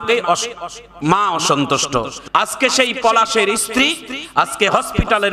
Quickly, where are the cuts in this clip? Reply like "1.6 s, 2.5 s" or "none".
2.2 s